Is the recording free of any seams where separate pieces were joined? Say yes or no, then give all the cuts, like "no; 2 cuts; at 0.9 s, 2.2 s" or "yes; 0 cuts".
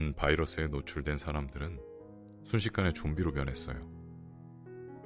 no; 1 cut; at 3.5 s